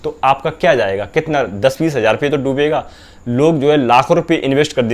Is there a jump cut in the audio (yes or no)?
no